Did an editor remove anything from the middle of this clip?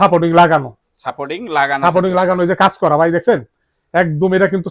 no; 0 cuts

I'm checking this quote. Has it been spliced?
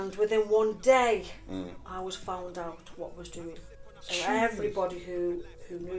no; 0 cuts

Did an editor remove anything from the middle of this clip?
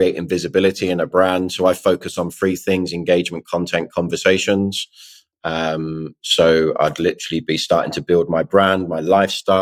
no; 0 cuts

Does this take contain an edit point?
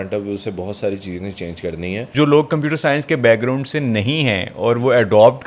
yes; 1 cut; at 2.1 s

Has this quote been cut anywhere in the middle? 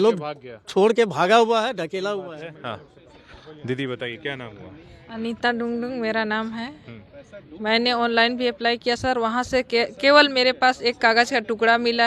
no; 0 cuts

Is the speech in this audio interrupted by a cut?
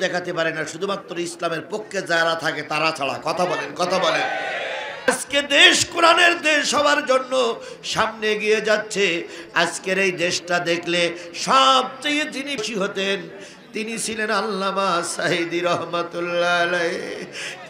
yes; 1 cut; at 5.1 s

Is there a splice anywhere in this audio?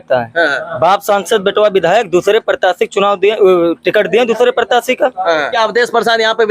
yes; 1 cut; at 5.5 s

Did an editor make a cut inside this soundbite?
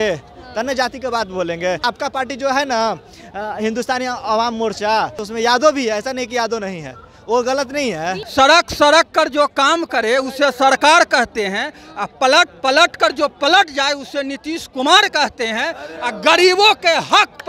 yes; 3 cuts; at 1.8 s, 5.2 s, 8.2 s

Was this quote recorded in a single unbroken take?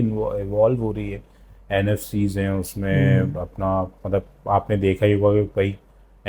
yes; 0 cuts

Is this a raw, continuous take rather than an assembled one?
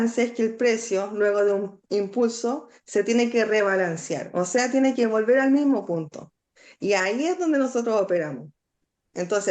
yes; 0 cuts

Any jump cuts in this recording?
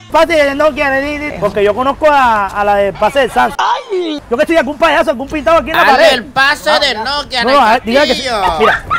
yes; 2 cuts; at 1.2 s, 4.2 s

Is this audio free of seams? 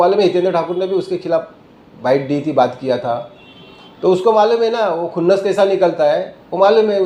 yes; 0 cuts

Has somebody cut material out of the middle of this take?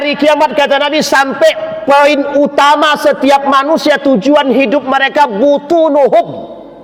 no; 0 cuts

